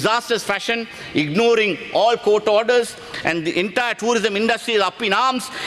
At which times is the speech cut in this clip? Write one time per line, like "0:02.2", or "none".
none